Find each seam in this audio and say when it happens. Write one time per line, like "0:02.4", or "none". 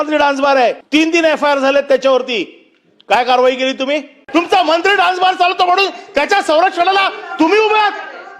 0:00.8
0:04.2